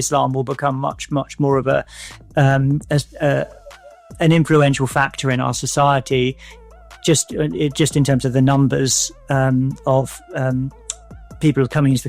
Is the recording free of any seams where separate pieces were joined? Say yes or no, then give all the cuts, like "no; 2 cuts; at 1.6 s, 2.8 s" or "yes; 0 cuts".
yes; 0 cuts